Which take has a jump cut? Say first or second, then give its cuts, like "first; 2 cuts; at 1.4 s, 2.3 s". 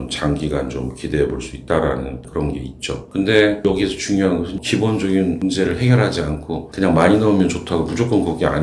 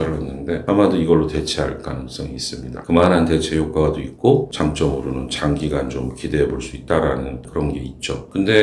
first; 2 cuts; at 4.6 s, 6.7 s